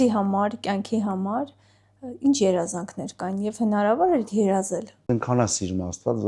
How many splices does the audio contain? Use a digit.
1